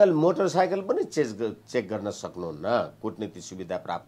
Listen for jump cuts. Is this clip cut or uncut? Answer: uncut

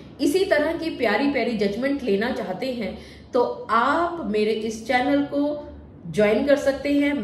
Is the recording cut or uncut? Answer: uncut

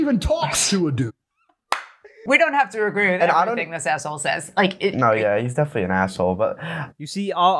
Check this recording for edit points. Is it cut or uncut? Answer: cut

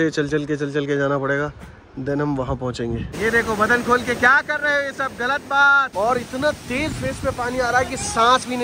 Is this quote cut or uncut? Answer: cut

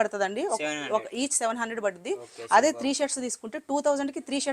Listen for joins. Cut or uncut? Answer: uncut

